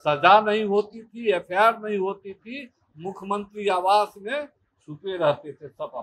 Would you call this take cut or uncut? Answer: uncut